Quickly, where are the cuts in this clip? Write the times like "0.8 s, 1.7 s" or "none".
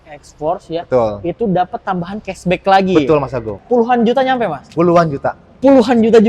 3.5 s